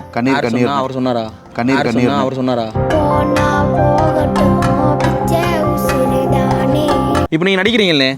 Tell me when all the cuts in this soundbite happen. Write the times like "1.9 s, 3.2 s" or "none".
7.2 s

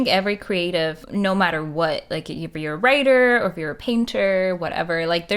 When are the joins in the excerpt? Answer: 1.0 s

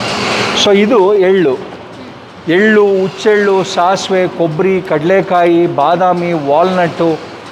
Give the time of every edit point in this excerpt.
none

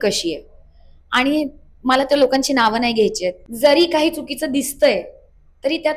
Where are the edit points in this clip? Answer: 3.4 s

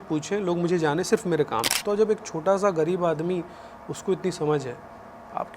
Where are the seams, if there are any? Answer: 1.7 s

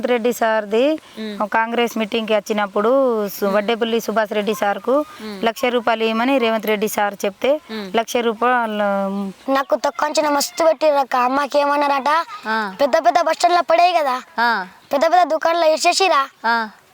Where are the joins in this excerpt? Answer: 9.4 s

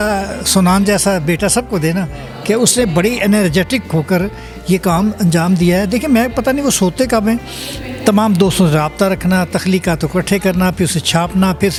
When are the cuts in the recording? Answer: none

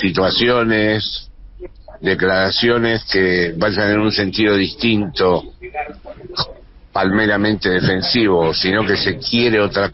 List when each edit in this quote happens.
none

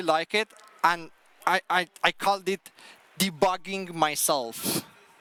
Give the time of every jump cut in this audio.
none

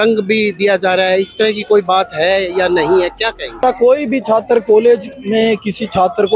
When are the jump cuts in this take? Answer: 3.6 s

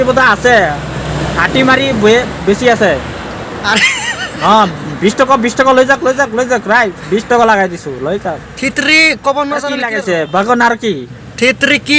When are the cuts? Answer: 9.8 s

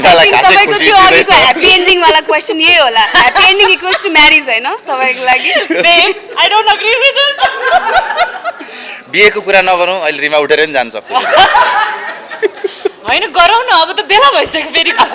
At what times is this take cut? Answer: none

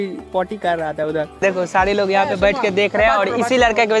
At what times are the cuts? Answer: 1.4 s

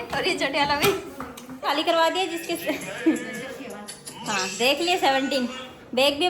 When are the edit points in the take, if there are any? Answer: 1.7 s

